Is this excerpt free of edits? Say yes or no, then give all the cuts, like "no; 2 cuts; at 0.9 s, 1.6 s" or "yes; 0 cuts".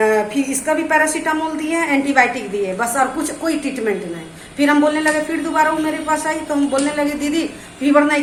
yes; 0 cuts